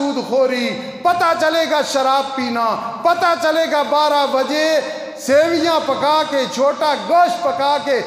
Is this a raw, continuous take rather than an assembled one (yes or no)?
yes